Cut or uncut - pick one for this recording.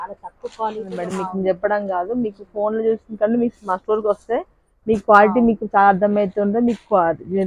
cut